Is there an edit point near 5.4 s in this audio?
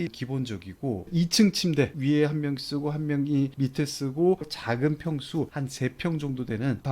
no; 2 cuts; at 1.0 s, 1.9 s

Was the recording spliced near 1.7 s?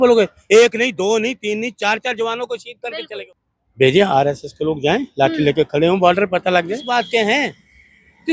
no; 2 cuts; at 3.2 s, 6.9 s

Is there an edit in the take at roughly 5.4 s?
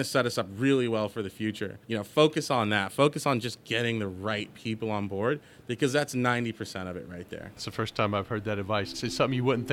no; 3 cuts; at 1.7 s, 7.7 s, 9.0 s

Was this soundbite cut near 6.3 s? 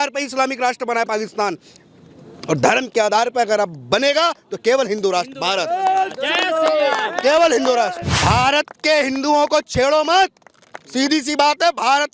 no; 1 cut; at 8.1 s

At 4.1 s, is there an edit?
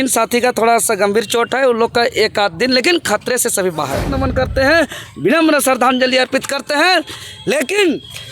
yes; 1 cut; at 4.1 s

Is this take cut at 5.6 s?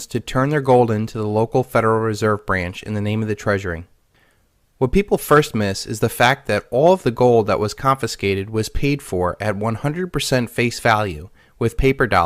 no; 1 cut; at 2.0 s

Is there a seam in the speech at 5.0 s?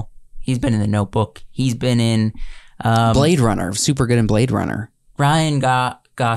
yes; 1 cut; at 5.0 s

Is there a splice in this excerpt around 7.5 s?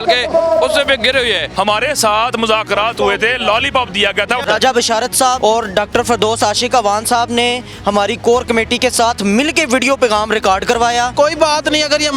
no; 4 cuts; at 1.5 s, 4.4 s, 5.4 s, 11.1 s

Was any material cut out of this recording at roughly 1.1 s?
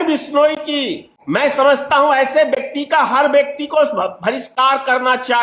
yes; 1 cut; at 1.1 s

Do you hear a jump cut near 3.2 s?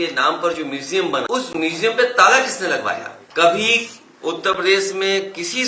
yes; 2 cuts; at 1.3 s, 3.2 s

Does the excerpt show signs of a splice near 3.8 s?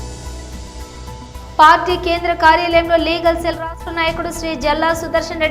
no; 1 cut; at 1.3 s

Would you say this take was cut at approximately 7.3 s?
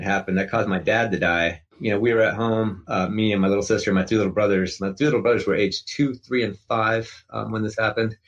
no; 1 cut; at 1.7 s

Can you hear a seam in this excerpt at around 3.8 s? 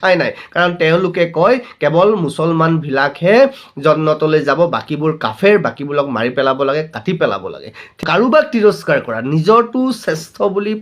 no; 1 cut; at 8.0 s

